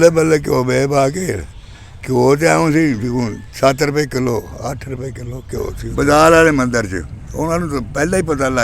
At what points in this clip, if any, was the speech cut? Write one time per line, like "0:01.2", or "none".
0:05.8